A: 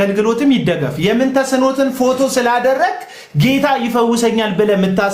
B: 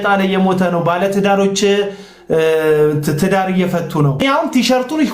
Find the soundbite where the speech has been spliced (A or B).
B